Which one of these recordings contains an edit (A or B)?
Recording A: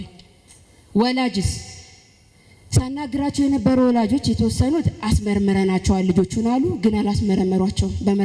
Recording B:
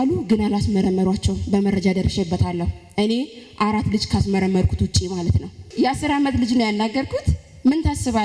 B